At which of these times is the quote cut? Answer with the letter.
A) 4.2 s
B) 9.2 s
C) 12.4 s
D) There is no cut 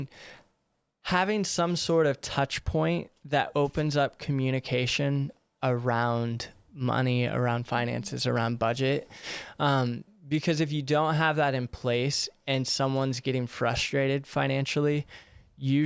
D